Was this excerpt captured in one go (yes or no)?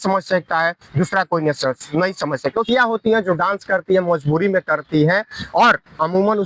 no